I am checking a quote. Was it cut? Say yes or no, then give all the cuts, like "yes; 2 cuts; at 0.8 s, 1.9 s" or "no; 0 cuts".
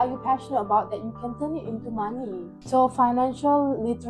yes; 1 cut; at 2.5 s